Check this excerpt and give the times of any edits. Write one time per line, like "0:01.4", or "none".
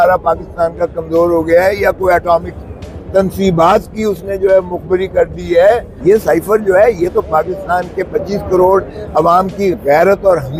0:05.9